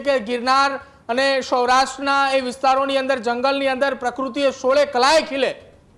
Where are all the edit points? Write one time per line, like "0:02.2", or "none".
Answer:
none